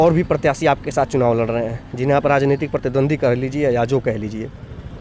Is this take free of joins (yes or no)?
yes